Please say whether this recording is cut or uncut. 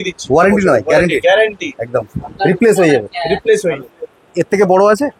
cut